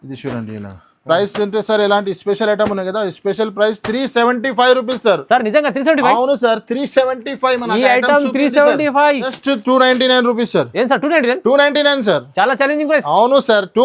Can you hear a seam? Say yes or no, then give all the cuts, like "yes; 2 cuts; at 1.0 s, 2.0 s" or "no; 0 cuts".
yes; 1 cut; at 9.3 s